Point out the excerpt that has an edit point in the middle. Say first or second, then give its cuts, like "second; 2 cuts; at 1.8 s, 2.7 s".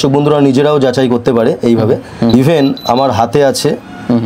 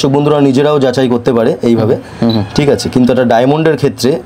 first; 1 cut; at 2.3 s